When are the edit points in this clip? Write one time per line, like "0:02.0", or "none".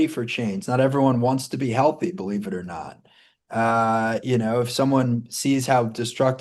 none

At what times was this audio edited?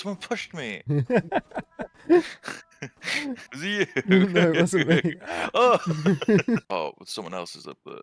0:06.6

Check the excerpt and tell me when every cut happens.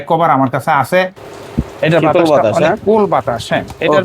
0:01.3

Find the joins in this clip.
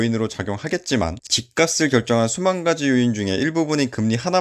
0:01.3

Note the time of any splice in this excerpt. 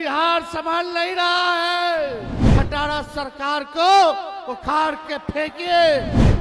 0:02.5

